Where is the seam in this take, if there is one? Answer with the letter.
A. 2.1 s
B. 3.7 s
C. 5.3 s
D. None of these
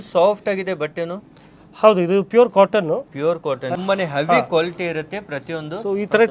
B